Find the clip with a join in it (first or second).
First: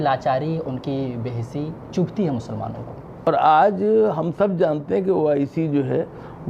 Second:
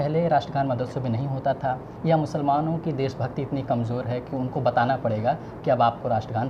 first